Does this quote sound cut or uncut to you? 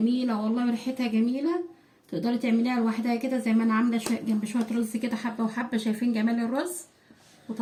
uncut